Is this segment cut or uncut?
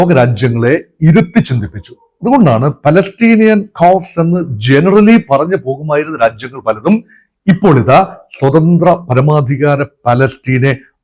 uncut